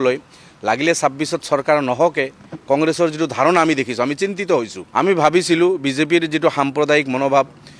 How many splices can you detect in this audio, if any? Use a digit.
1